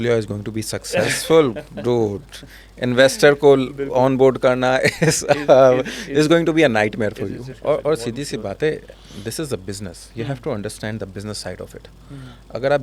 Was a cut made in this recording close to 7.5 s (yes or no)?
yes